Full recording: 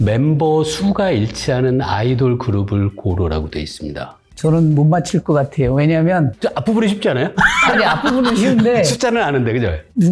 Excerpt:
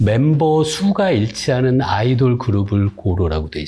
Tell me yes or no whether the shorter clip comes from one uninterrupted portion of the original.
yes